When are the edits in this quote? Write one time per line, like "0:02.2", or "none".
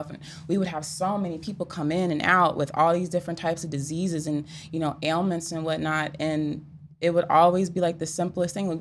none